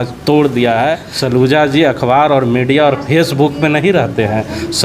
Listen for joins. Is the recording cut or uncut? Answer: cut